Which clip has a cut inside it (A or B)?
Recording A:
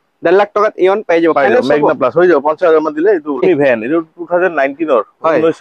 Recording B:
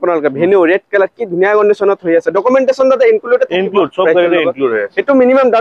A